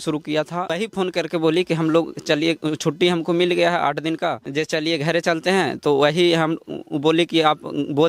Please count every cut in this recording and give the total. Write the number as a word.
two